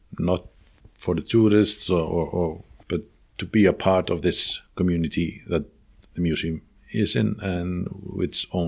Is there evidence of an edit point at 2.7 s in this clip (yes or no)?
no